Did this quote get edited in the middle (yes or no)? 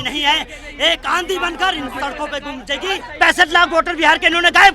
yes